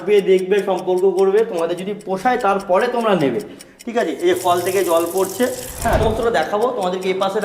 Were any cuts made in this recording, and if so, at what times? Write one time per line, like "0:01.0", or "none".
0:06.0